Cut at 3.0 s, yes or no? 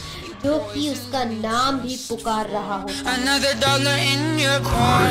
yes